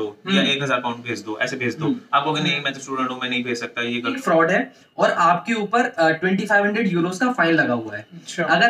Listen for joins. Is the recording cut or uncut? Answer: cut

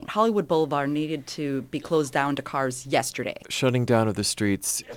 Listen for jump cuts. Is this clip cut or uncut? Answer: cut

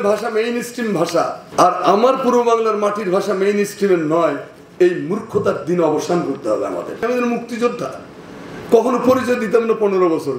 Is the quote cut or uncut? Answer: cut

